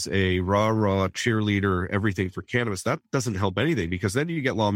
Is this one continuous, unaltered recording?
yes; 0 cuts

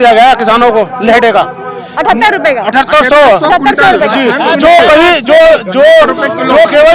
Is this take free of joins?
yes; 0 cuts

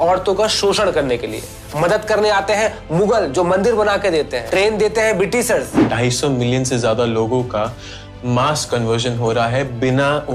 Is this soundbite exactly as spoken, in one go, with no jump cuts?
no; 2 cuts; at 4.4 s, 5.9 s

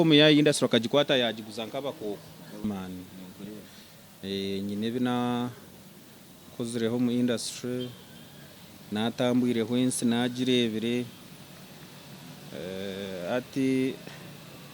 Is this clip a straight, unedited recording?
no; 1 cut; at 2.6 s

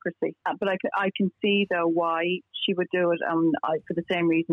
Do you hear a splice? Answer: no; 0 cuts

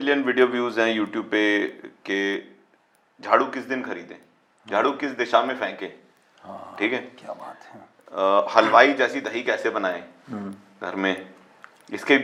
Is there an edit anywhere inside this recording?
no; 0 cuts

